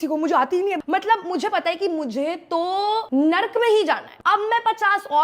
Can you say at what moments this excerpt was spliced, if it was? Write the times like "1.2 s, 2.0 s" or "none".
0.8 s, 3.0 s, 4.1 s